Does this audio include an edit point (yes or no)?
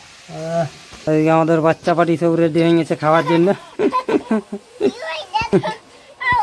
no